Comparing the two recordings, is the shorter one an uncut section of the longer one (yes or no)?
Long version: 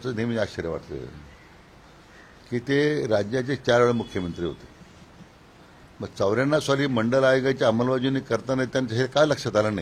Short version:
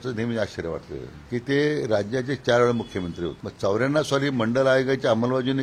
no